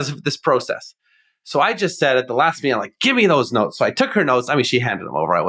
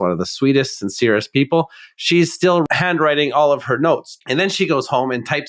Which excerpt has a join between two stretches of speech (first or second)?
second